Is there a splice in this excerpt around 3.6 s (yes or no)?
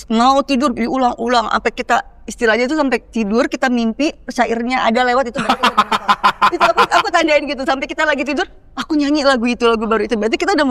no